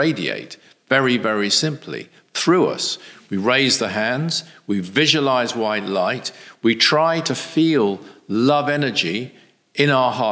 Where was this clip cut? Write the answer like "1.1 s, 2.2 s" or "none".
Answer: none